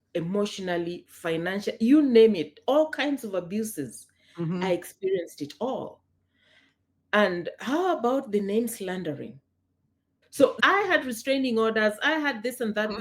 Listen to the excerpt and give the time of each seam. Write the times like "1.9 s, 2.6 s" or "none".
10.6 s